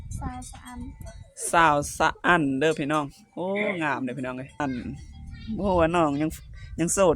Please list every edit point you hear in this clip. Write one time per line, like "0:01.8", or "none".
0:04.6